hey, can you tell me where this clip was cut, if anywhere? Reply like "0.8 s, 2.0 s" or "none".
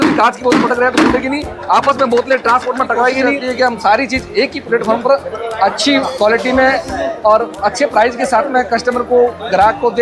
3.4 s